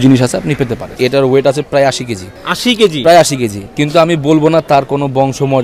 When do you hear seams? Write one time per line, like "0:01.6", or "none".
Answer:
0:00.9